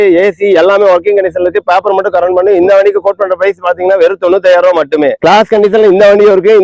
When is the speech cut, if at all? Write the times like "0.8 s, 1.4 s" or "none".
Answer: 5.1 s